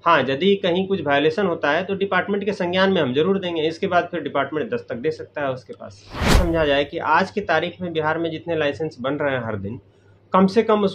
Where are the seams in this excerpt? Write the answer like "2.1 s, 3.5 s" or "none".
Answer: 6.4 s

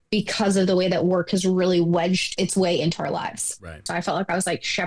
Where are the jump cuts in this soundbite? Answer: 2.3 s, 3.9 s

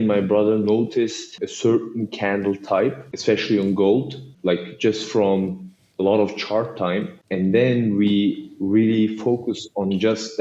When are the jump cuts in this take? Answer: 1.4 s, 3.1 s, 4.2 s, 7.2 s

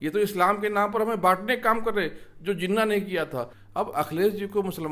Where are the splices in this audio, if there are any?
3.6 s

